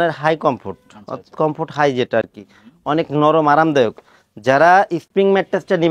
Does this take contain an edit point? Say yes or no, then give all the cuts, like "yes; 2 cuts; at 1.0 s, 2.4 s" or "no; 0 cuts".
no; 0 cuts